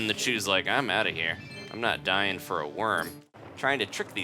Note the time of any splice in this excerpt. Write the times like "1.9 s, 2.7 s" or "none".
3.3 s